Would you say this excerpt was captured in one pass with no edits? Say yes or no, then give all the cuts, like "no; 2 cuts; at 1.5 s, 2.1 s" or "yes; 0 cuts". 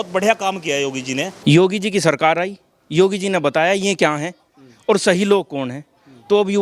no; 1 cut; at 1.3 s